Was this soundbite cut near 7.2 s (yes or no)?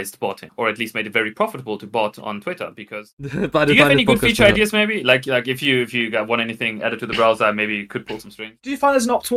no